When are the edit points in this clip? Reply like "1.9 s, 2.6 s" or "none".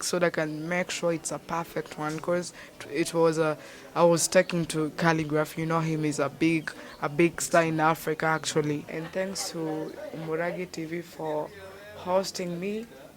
9.0 s

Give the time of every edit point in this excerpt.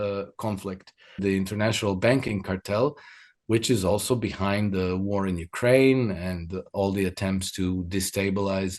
1.2 s

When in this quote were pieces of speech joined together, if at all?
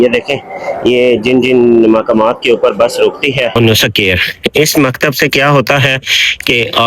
3.5 s

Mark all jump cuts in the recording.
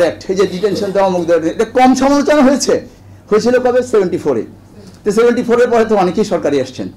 none

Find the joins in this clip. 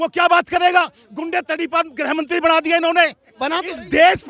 3.3 s

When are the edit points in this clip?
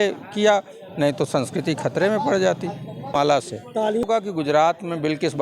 3.1 s, 4.1 s

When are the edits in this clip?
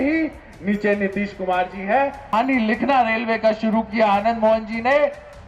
2.3 s

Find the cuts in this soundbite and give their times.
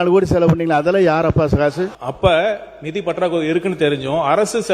2.0 s

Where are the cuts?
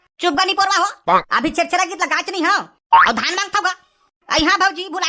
none

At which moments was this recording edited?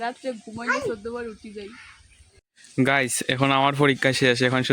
2.4 s

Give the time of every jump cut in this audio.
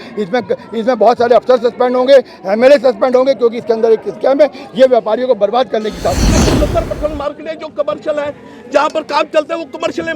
6.3 s

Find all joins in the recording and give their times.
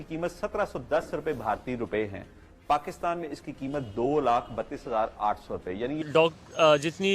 6.0 s

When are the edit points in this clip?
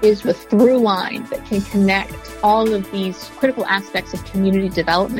1.2 s, 2.2 s

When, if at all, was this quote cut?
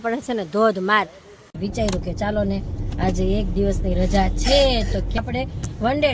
1.5 s, 5.2 s

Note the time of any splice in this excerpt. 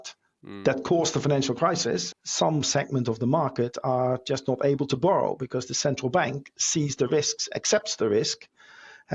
2.1 s

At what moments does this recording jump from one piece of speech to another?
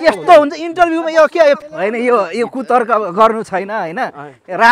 1.6 s

